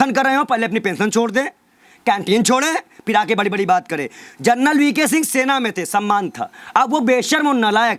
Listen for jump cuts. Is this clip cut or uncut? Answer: uncut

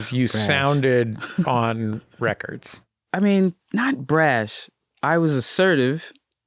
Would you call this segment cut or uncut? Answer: cut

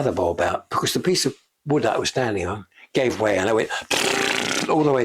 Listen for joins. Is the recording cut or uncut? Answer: uncut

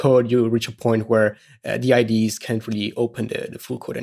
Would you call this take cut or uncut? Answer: uncut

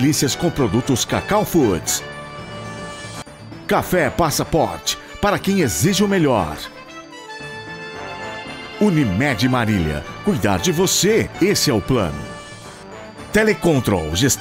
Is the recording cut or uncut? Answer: cut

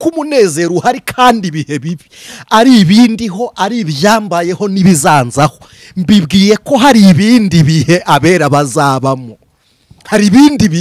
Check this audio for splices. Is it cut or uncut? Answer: uncut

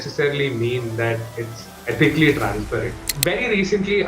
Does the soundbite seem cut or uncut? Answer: cut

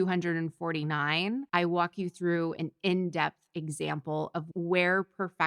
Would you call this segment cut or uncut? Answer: cut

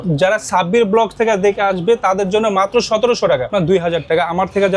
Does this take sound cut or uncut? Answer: cut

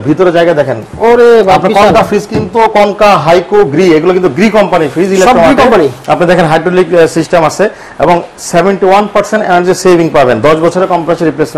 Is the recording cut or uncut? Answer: uncut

